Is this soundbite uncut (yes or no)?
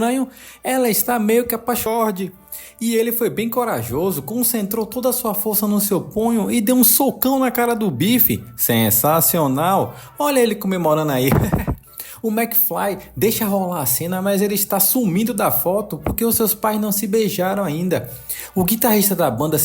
no